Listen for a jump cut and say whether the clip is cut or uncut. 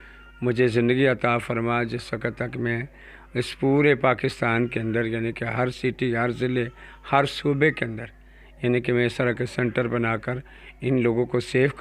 uncut